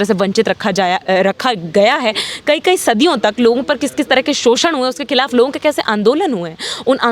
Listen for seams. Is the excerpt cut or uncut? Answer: uncut